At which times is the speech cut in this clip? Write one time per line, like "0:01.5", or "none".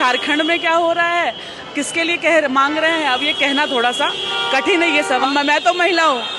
0:05.3